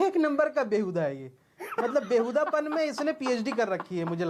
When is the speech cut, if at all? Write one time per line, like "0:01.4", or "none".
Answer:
none